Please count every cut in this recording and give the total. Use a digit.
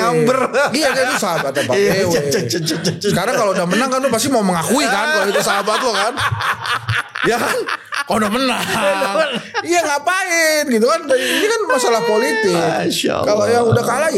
0